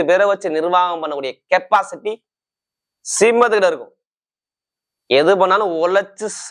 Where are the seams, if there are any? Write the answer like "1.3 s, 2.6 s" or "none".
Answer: none

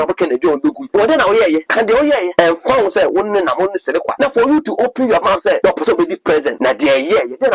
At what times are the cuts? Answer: 0.8 s, 2.1 s, 4.1 s, 5.6 s, 6.5 s

